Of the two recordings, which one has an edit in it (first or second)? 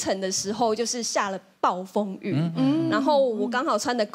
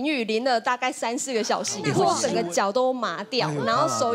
second